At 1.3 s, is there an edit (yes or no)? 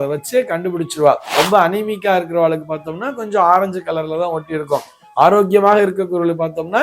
yes